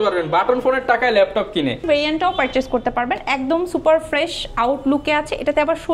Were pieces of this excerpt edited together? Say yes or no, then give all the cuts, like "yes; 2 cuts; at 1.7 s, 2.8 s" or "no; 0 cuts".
yes; 1 cut; at 1.8 s